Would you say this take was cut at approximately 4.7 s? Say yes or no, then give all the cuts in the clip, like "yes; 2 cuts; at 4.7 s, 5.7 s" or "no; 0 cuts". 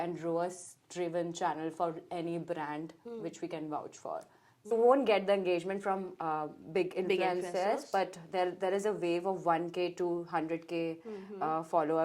yes; 1 cut; at 4.7 s